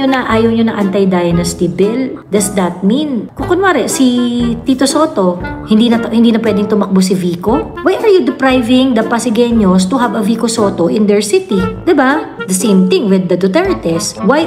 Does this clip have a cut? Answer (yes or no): no